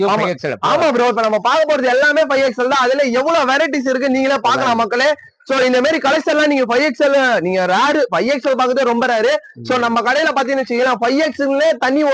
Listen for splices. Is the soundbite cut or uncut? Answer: uncut